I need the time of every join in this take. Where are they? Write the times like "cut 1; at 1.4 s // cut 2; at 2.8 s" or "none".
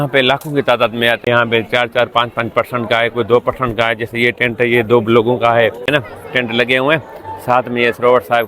cut 1; at 1.2 s // cut 2; at 5.9 s